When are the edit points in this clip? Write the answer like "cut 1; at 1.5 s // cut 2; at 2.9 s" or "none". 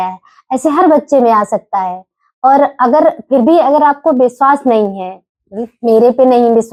none